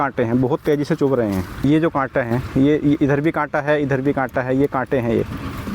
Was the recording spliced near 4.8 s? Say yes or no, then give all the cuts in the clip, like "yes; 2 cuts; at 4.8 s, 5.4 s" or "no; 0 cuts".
no; 1 cut; at 1.6 s